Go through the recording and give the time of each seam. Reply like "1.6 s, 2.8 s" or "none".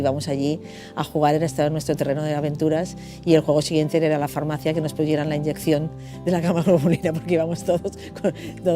5.2 s